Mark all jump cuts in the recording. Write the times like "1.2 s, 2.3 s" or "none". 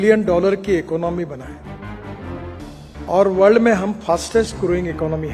1.5 s, 3.1 s